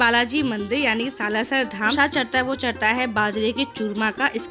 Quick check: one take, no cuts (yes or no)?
no